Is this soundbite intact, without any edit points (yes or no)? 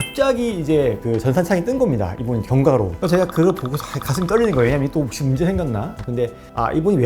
no